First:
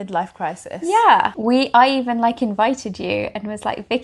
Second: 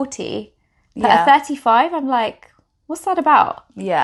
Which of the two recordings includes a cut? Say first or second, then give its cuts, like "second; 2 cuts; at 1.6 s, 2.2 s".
first; 1 cut; at 1.4 s